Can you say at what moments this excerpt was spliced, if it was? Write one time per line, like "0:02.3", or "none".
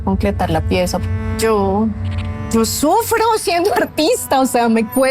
0:01.0